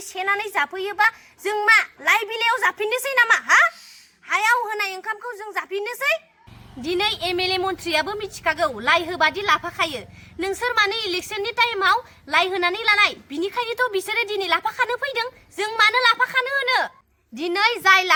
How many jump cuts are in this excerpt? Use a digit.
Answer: 0